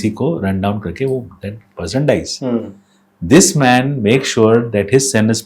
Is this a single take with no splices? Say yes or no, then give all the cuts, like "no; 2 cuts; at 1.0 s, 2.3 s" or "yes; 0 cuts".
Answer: yes; 0 cuts